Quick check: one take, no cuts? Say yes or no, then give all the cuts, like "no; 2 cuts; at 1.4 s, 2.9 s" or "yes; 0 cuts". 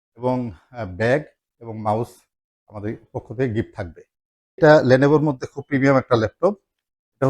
no; 1 cut; at 4.6 s